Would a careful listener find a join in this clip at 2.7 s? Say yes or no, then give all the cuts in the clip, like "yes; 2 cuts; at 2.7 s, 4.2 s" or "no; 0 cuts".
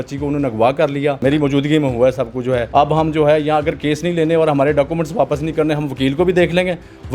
yes; 2 cuts; at 1.2 s, 2.7 s